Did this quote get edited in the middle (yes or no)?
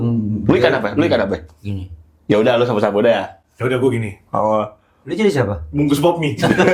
no